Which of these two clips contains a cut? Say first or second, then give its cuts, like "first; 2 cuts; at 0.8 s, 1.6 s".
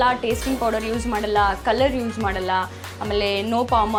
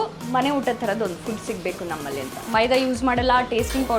second; 1 cut; at 2.4 s